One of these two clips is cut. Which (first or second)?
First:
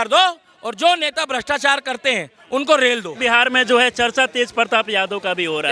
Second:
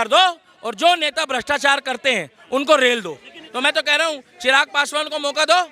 second